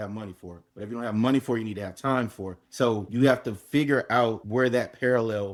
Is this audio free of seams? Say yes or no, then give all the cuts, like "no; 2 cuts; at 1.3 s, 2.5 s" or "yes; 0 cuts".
yes; 0 cuts